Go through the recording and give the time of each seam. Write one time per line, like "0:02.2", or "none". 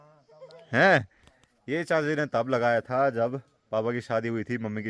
0:01.7